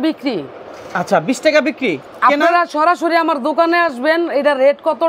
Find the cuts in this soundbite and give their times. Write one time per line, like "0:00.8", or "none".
none